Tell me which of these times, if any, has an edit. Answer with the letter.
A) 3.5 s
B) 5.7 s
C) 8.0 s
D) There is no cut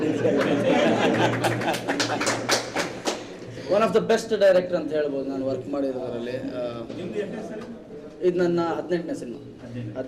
A